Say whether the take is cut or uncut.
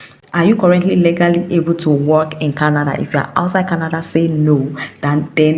uncut